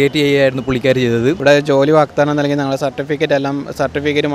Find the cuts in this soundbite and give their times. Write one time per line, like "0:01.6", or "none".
0:01.4